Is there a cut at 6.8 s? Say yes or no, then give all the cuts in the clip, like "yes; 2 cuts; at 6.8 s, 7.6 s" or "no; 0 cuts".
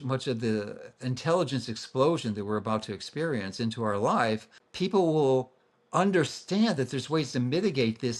no; 1 cut; at 4.6 s